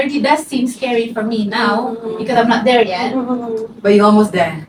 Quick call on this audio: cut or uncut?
uncut